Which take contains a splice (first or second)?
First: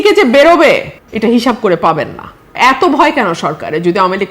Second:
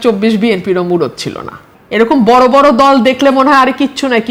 first